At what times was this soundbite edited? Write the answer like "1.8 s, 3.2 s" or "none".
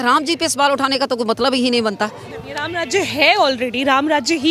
2.2 s